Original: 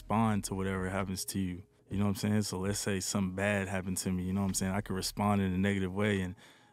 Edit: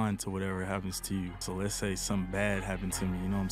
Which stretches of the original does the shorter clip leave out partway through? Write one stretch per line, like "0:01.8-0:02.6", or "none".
0:01.7-0:02.5

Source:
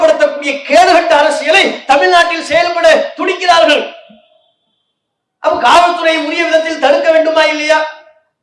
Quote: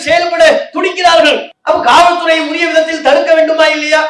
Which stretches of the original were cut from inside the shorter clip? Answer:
0:03.9-0:05.3

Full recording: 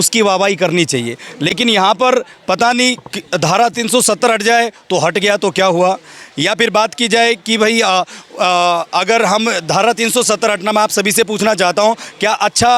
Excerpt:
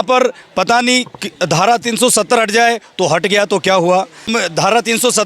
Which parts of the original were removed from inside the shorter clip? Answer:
0:06.2-0:09.4

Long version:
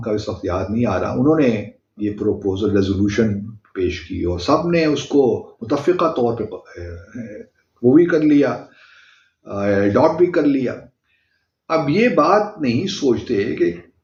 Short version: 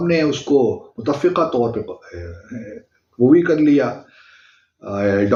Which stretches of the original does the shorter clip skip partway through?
none

